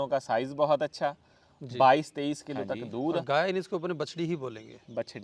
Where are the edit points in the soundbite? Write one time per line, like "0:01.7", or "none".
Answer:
0:03.2